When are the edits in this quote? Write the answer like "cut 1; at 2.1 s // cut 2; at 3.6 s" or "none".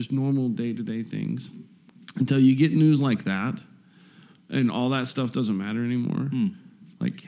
cut 1; at 2.0 s